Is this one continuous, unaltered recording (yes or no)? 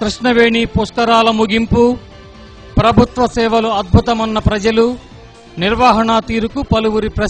yes